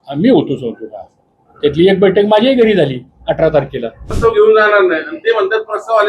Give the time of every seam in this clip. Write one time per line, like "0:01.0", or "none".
0:04.2